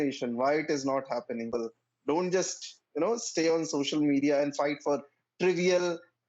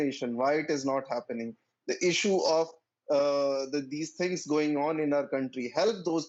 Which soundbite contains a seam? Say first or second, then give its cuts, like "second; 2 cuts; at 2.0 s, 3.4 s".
first; 1 cut; at 1.5 s